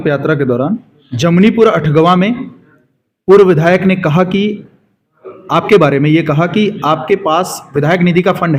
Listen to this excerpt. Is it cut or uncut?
uncut